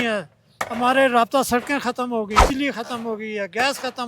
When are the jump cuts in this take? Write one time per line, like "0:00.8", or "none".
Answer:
0:02.4